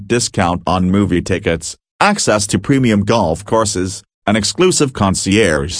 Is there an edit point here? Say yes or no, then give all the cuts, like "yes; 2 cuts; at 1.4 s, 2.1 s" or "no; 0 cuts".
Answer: no; 0 cuts